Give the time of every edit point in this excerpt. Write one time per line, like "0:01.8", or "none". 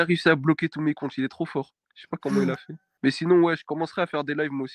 0:02.9